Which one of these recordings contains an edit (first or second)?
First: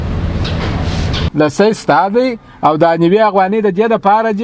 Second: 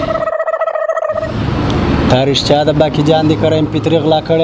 first